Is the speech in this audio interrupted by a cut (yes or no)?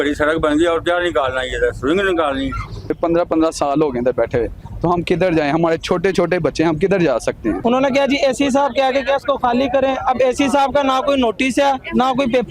yes